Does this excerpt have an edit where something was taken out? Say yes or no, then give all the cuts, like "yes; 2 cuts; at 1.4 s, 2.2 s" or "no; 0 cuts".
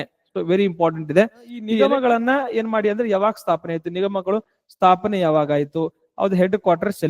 yes; 1 cut; at 1.6 s